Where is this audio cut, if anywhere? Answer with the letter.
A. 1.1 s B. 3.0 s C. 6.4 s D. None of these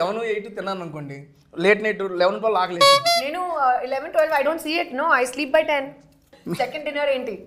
C